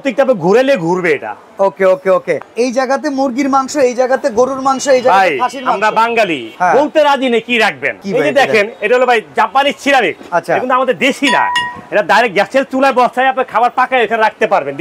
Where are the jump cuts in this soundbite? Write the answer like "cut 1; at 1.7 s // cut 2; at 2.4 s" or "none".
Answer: cut 1; at 2.4 s // cut 2; at 6.4 s // cut 3; at 8.0 s // cut 4; at 10.2 s